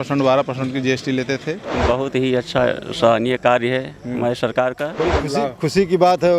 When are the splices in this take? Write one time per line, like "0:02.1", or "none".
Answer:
0:01.6
0:04.9

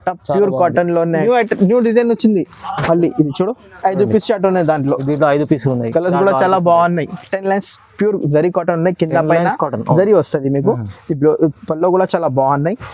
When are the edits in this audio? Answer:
0:01.2
0:07.2

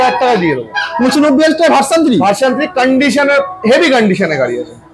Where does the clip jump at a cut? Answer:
none

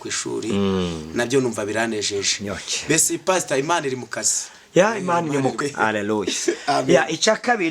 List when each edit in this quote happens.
0:05.6

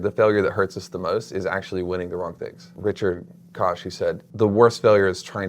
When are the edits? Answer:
0:02.7
0:04.3

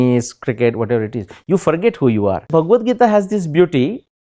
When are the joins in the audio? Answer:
0:02.5

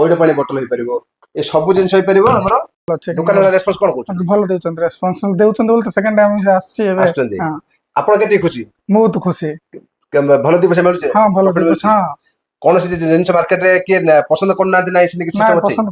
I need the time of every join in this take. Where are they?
0:03.0

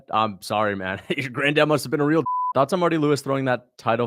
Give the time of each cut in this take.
0:02.4

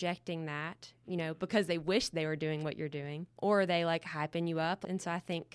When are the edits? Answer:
0:03.2
0:04.8

